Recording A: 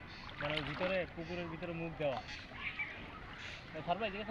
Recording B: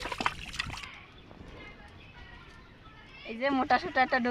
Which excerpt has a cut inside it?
B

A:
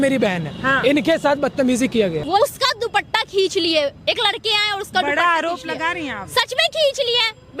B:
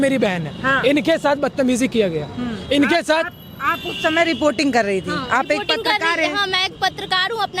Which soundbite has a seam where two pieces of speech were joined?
A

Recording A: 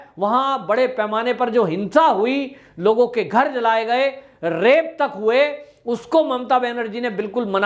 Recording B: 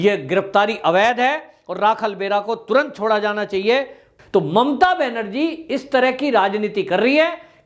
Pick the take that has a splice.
B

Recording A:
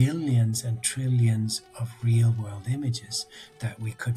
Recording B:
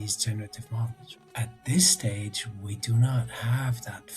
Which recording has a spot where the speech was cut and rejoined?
B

